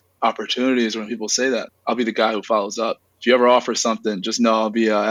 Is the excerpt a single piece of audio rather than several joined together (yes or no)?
yes